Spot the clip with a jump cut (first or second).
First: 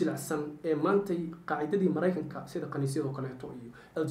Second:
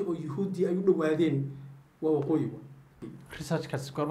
second